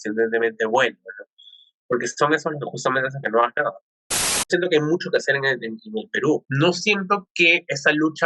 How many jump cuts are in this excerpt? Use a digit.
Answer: 1